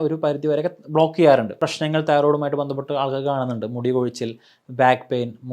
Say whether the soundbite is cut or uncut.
cut